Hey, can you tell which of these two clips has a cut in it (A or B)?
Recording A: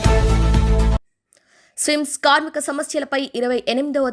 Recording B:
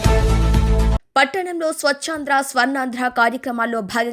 B